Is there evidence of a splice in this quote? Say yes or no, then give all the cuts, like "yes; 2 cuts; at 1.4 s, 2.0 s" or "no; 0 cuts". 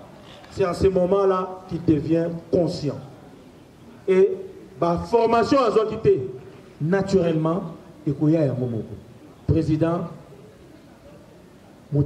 no; 0 cuts